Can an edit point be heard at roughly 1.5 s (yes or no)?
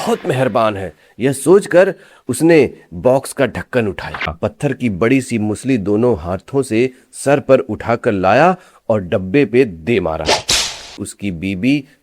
no